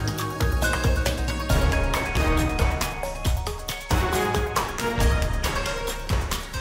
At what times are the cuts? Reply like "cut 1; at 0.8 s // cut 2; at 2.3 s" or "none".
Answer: none

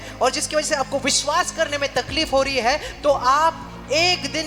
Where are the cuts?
none

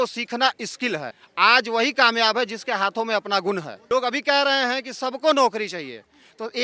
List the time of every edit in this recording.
cut 1; at 1.2 s // cut 2; at 3.7 s

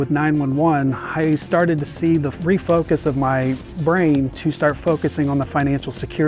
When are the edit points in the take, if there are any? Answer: cut 1; at 2.3 s

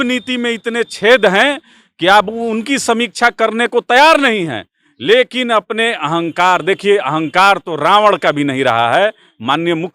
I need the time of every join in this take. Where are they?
none

